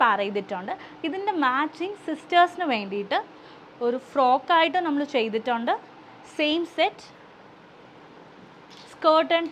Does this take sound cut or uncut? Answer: uncut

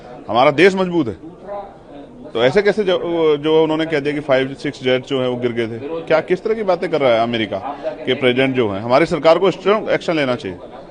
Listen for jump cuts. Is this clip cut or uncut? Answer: uncut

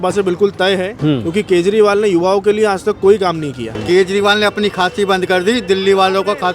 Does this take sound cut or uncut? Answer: cut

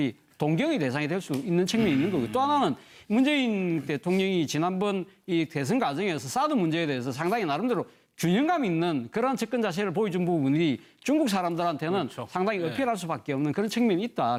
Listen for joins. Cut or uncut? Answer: uncut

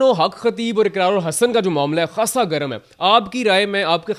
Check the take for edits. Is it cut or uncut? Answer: uncut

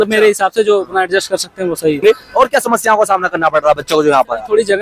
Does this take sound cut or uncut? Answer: cut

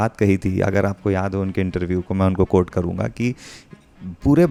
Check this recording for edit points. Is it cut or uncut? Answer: uncut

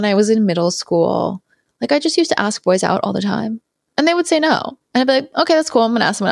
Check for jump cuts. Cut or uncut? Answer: uncut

